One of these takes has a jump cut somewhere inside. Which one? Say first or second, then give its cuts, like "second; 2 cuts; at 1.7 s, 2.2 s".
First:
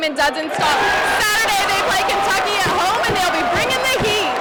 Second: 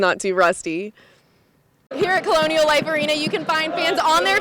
second; 1 cut; at 1.4 s